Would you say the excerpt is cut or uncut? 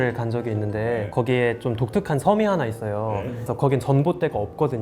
cut